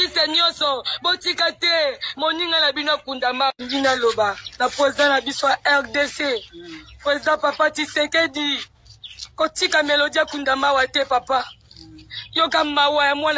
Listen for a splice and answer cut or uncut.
cut